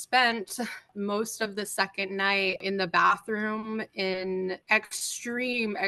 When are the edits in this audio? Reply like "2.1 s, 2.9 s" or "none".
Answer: 0.9 s, 2.6 s, 4.6 s